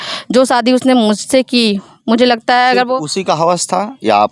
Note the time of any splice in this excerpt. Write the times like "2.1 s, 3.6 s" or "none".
none